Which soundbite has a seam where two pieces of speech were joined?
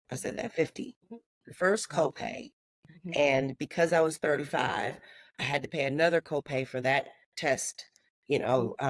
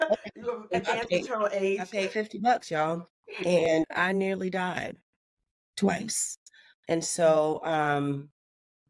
second; 2 cuts; at 1.9 s, 3.7 s

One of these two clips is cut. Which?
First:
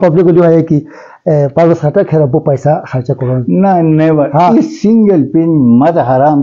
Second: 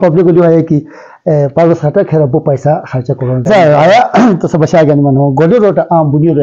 second; 1 cut; at 3.5 s

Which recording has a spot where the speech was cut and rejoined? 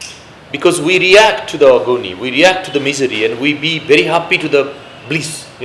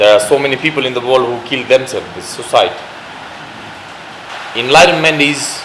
second; 1 cut; at 4.3 s

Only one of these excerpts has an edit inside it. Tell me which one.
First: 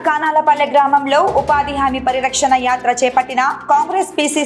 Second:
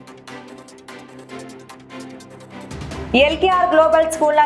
second; 1 cut; at 2.0 s

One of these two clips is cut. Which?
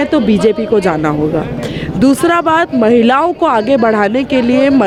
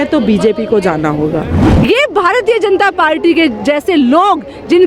second; 1 cut; at 1.6 s

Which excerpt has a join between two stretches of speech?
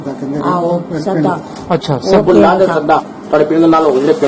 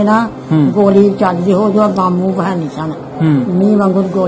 first; 1 cut; at 3.2 s

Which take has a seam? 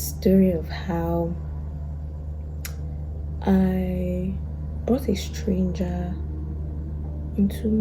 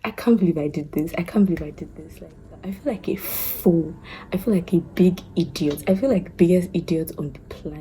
second; 1 cut; at 2.8 s

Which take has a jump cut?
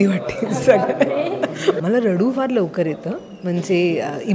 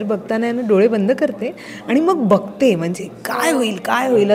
first; 1 cut; at 1.8 s

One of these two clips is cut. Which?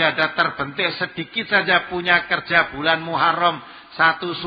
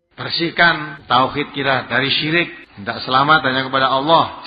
second; 2 cuts; at 0.9 s, 2.7 s

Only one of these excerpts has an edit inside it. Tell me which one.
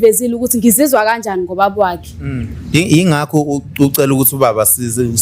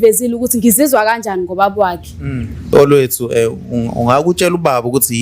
second; 1 cut; at 2.7 s

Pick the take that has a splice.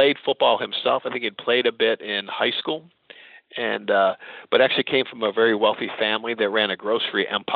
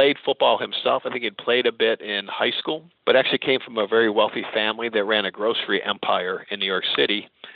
second; 1 cut; at 2.9 s

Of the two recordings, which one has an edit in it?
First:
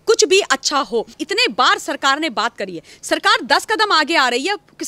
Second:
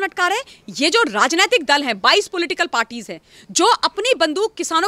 first; 1 cut; at 1.2 s

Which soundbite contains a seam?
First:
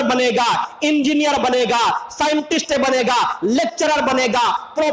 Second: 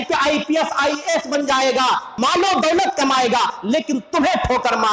second; 1 cut; at 2.1 s

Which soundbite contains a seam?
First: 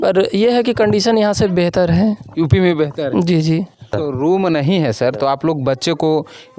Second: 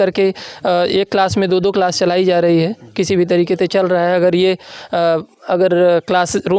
first; 1 cut; at 3.9 s

